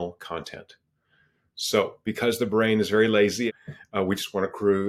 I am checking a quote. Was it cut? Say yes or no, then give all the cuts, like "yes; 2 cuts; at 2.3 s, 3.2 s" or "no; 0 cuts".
yes; 1 cut; at 3.5 s